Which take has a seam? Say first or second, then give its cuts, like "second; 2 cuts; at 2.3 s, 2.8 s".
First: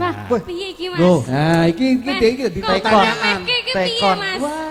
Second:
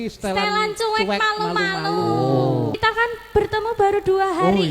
second; 1 cut; at 2.7 s